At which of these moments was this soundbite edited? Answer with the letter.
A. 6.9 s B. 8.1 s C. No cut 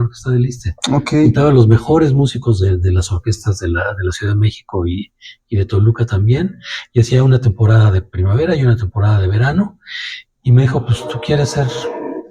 C